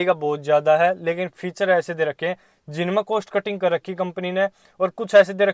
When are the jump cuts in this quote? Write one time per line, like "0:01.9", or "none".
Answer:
none